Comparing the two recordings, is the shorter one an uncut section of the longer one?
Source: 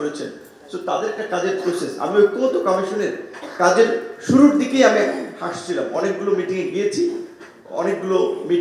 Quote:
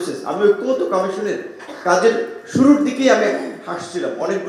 yes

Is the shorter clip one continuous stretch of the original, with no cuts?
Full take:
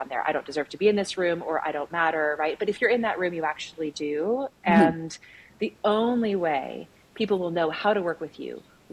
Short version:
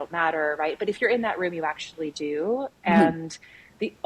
yes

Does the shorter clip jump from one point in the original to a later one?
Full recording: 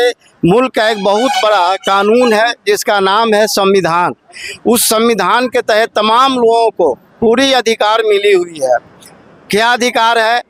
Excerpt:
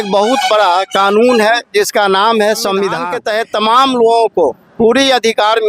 yes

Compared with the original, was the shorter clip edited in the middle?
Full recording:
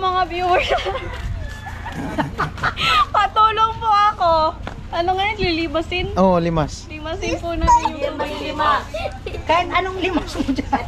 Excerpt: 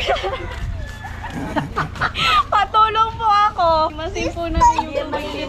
yes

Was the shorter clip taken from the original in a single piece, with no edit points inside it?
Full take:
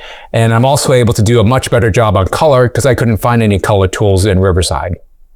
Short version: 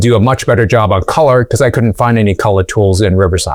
yes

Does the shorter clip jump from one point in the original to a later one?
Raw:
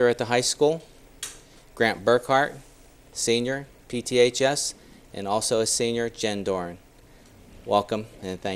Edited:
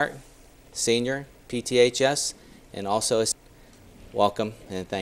yes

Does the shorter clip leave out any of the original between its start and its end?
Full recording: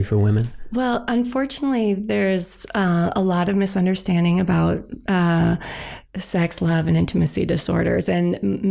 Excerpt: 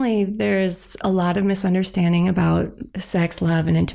yes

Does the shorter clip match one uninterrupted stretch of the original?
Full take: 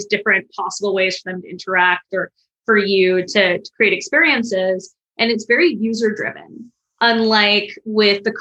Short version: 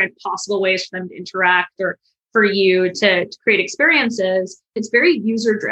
no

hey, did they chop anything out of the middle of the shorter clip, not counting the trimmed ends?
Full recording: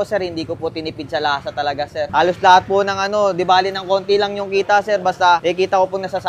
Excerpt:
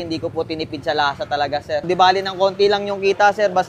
yes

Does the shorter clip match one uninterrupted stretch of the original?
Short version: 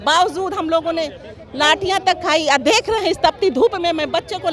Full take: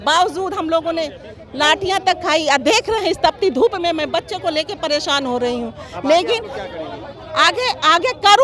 yes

